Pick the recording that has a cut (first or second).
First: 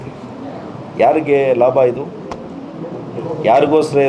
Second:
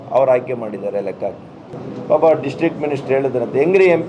second